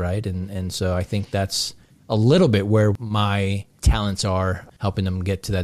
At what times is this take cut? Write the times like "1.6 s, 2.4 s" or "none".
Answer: 3.0 s, 4.7 s